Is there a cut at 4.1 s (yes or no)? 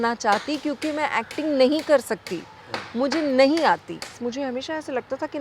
yes